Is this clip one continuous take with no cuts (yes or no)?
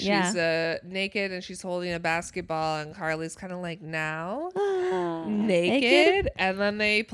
yes